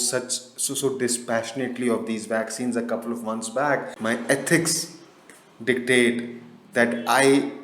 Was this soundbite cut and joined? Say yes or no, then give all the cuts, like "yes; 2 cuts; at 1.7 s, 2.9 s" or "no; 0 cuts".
yes; 1 cut; at 3.9 s